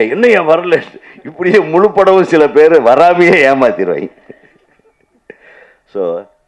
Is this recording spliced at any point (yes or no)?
no